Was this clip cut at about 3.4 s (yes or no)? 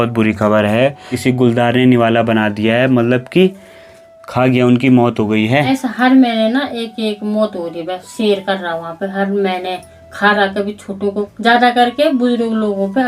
no